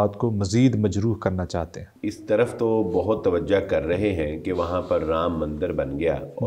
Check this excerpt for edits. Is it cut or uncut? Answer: cut